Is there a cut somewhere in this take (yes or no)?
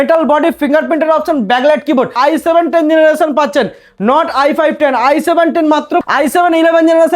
yes